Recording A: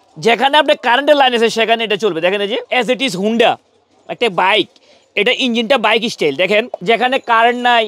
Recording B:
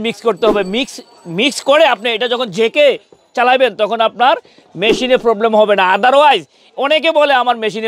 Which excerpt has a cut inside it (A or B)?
A